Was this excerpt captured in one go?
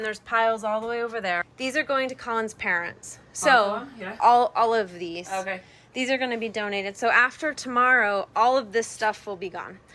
yes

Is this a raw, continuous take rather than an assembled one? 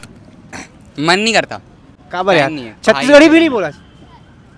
yes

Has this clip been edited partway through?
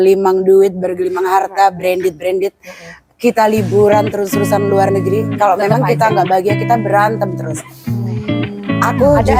no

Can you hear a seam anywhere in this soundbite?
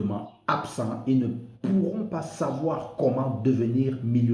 no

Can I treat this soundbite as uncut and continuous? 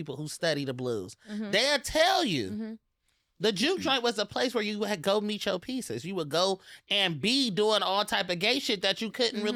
yes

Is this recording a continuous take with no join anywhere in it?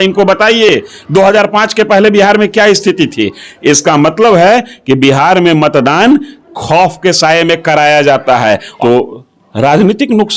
no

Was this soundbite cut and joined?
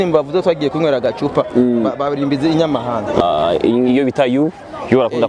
yes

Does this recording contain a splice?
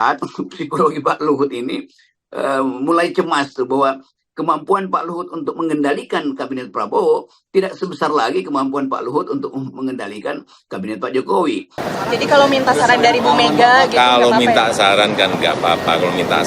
yes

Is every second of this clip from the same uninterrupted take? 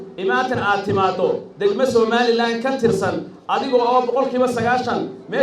yes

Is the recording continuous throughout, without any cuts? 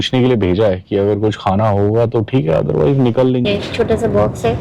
no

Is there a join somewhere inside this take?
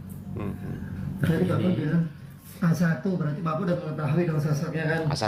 no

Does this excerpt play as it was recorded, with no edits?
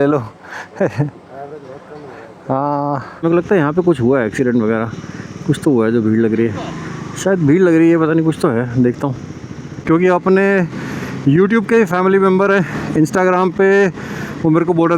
no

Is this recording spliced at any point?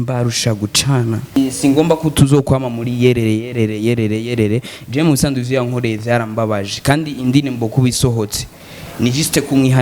yes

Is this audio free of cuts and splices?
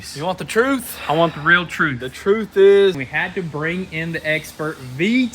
no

